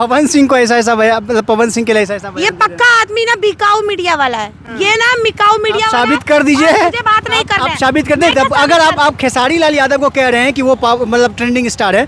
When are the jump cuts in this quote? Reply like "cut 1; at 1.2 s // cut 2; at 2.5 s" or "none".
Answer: none